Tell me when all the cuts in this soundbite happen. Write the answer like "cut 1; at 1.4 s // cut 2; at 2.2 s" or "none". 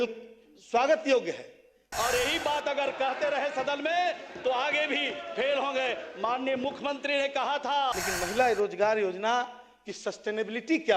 cut 1; at 1.8 s // cut 2; at 8.0 s

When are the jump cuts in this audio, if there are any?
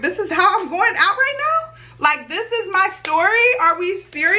none

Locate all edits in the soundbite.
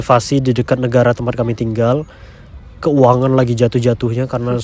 none

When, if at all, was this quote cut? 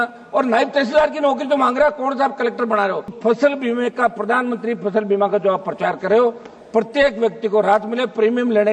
cut 1; at 3.2 s

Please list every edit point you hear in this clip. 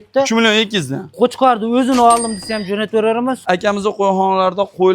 cut 1; at 3.4 s

